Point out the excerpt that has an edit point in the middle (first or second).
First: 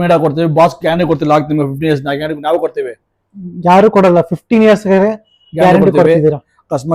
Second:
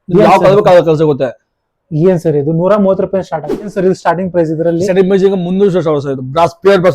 second